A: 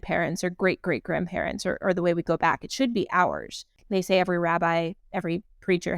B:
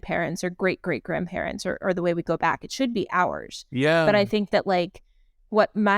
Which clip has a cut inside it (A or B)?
A